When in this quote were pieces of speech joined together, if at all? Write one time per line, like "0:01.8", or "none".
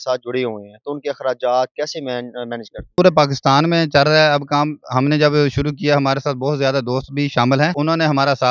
0:02.9
0:07.7